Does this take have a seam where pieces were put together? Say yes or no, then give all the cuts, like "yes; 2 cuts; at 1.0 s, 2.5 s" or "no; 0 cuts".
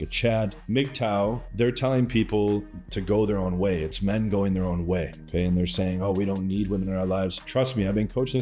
yes; 1 cut; at 1.5 s